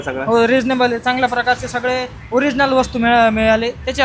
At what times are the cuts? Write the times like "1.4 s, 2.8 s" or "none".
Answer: none